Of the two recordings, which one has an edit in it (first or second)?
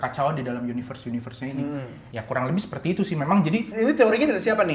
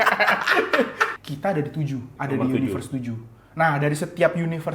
second